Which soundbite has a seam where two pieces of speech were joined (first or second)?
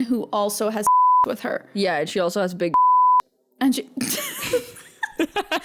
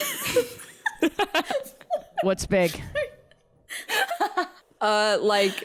second